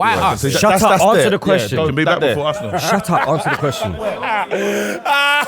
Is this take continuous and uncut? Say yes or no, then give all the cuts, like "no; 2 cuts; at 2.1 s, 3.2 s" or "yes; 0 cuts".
no; 1 cut; at 3.6 s